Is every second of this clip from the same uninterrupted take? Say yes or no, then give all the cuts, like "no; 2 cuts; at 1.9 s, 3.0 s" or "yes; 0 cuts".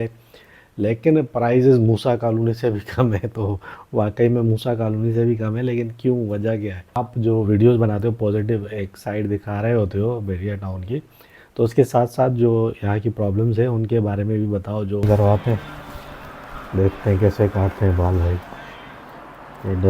no; 2 cuts; at 7.0 s, 15.0 s